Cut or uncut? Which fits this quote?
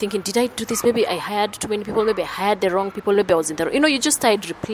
uncut